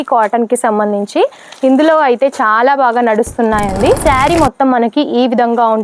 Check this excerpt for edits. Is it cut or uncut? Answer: uncut